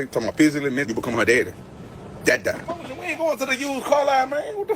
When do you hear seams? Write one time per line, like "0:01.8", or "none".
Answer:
0:02.9

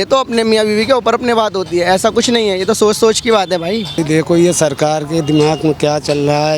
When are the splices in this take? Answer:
0:04.0

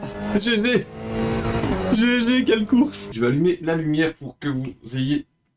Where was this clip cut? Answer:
0:03.0

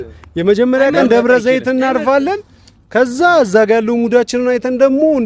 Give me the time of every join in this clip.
none

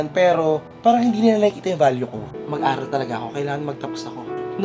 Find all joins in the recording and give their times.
0:02.3

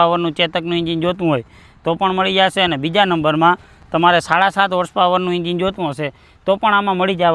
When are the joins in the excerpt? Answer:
none

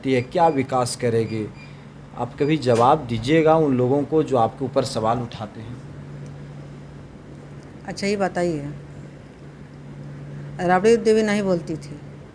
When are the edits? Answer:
none

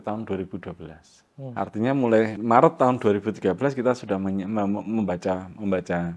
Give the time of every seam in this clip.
0:01.5
0:02.4

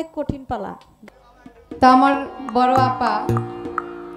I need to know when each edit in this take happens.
0:00.9

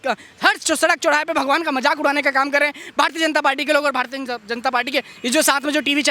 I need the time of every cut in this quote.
none

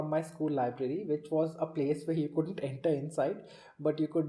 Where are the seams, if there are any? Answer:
none

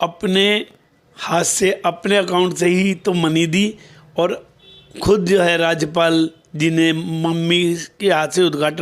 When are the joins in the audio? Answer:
none

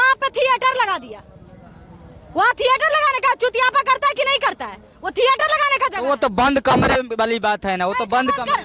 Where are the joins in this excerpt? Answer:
none

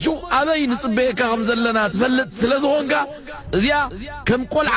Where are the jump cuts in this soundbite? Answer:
none

